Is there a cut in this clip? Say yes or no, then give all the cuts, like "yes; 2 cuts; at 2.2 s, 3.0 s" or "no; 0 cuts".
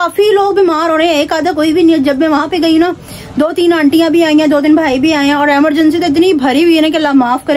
no; 0 cuts